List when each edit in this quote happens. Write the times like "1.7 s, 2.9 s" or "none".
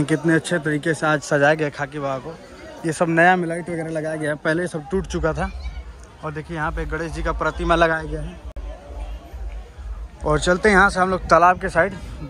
none